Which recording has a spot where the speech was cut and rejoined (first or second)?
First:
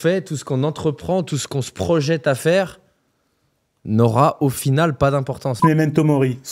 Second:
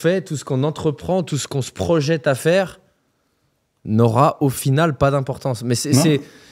first